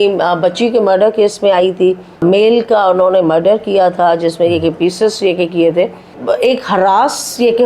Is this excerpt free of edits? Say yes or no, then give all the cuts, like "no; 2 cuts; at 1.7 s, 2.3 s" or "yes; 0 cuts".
no; 2 cuts; at 2.2 s, 6.2 s